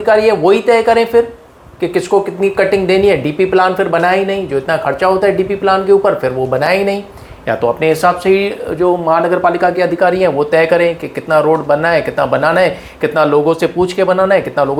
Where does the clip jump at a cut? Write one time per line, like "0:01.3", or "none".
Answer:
none

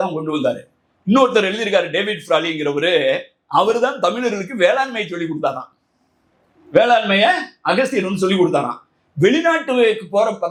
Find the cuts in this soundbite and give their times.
none

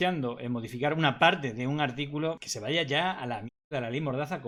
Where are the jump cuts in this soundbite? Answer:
none

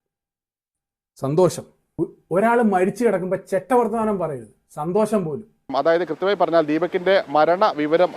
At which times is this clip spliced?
0:05.6

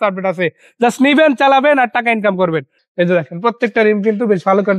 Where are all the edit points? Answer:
0:02.8

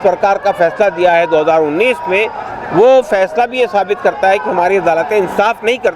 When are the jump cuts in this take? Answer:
none

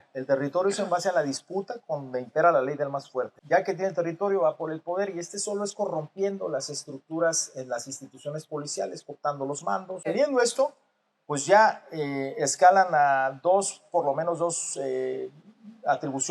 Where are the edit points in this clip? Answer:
0:03.4
0:09.9

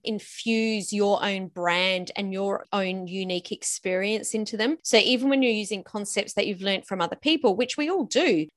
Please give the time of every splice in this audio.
none

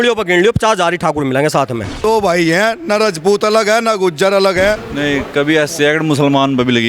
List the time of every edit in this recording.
0:02.0
0:04.9

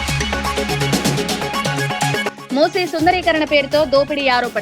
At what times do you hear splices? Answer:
0:01.8

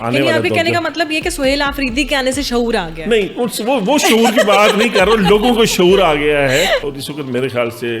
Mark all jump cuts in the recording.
0:06.9

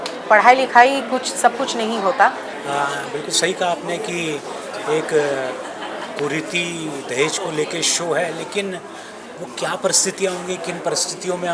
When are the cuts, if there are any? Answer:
0:02.5

